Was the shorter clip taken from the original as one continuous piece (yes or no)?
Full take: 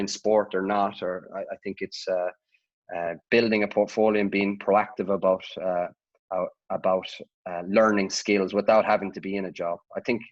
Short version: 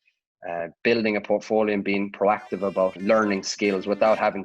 no